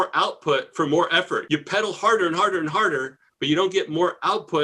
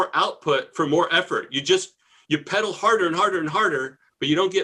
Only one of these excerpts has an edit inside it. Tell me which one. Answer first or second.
first